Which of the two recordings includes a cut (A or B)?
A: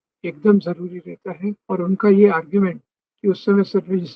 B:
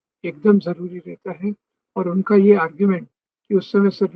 A